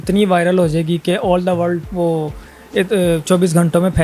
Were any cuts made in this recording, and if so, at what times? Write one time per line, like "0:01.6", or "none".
none